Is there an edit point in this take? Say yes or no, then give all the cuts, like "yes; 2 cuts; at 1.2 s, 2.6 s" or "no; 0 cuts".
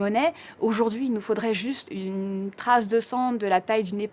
yes; 1 cut; at 1.8 s